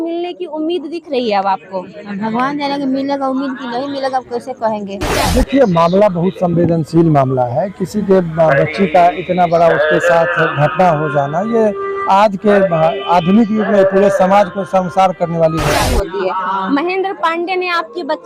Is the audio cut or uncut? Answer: cut